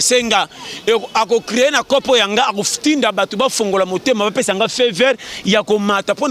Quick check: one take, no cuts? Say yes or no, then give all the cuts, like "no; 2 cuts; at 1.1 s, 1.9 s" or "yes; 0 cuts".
yes; 0 cuts